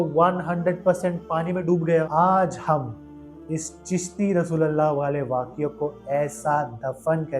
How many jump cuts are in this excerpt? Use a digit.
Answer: 1